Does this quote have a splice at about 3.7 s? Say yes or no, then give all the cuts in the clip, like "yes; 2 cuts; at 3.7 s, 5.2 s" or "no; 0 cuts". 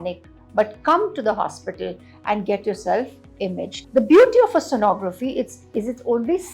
yes; 1 cut; at 3.7 s